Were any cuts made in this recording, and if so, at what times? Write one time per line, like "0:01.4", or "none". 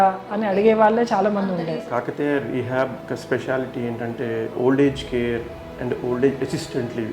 0:01.6
0:03.0
0:04.5